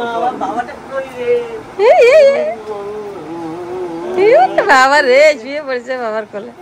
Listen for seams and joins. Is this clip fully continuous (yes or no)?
yes